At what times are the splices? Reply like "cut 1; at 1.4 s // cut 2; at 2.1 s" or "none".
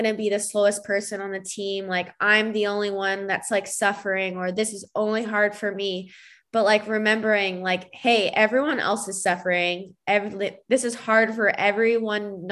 none